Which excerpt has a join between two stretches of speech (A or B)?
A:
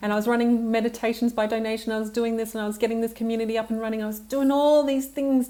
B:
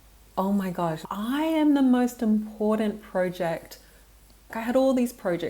B